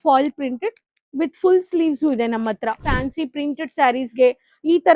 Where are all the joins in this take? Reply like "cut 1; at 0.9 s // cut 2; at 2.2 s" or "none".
cut 1; at 2.9 s